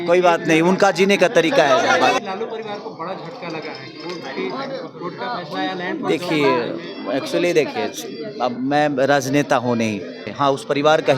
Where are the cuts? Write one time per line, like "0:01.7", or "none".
0:02.3
0:10.2